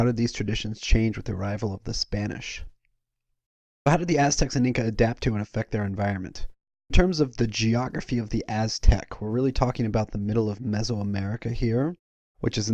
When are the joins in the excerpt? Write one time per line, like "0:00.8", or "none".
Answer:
0:07.9